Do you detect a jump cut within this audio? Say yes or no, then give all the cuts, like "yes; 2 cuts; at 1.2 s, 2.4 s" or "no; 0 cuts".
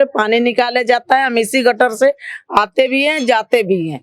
no; 0 cuts